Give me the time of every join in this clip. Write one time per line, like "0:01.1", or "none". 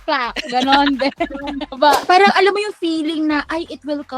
0:02.0